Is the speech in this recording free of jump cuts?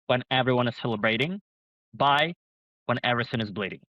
yes; 0 cuts

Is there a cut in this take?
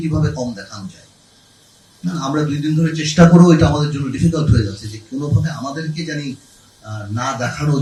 no; 0 cuts

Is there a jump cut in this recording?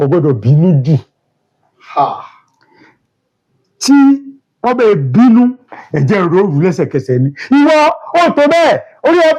no; 0 cuts

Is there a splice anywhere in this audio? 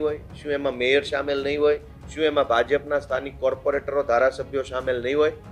no; 0 cuts

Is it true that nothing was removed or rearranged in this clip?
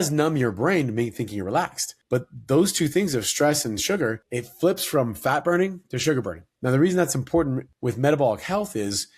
no; 2 cuts; at 6.4 s, 7.7 s

